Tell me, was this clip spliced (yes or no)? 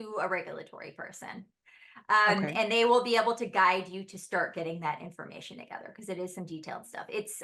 no